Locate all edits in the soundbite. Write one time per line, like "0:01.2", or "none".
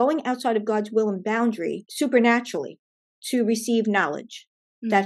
0:01.8